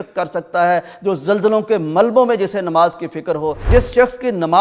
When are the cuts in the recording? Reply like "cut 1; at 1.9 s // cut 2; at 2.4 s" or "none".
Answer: cut 1; at 3.7 s